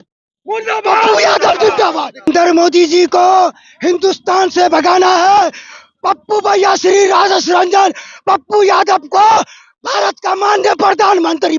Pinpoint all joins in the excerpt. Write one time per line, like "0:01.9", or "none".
0:02.3

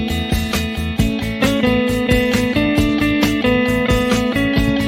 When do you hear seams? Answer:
none

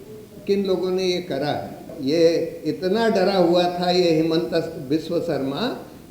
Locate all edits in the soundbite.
0:01.9

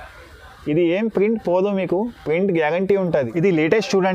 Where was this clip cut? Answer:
0:03.1

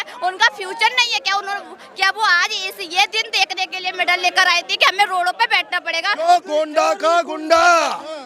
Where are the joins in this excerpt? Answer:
0:06.2

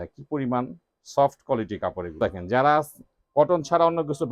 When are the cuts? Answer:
0:02.2

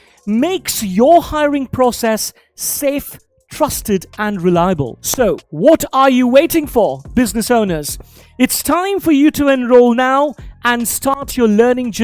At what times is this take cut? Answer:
0:04.9

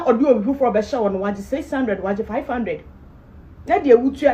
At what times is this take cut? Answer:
none

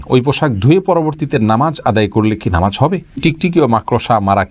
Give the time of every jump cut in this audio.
0:03.2

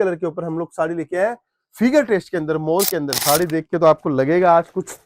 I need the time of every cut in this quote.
0:03.1

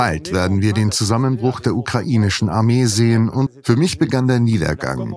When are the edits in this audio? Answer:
0:03.5

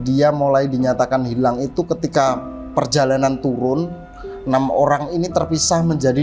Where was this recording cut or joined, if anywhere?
none

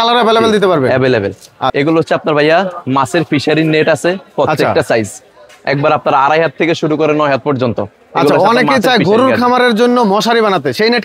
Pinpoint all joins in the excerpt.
0:01.7

